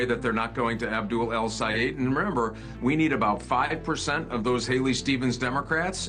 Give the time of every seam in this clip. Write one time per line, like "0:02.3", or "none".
0:02.7